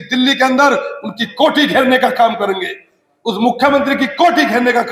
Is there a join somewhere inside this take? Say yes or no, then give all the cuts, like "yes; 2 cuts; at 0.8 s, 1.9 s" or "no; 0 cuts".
no; 0 cuts